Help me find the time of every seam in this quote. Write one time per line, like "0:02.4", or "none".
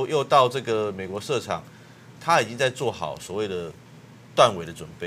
0:02.1